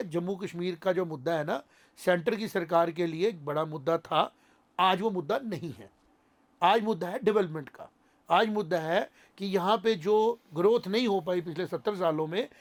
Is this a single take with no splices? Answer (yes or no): yes